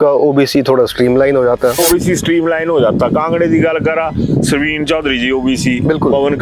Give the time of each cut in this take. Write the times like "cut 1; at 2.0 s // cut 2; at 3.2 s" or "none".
cut 1; at 1.8 s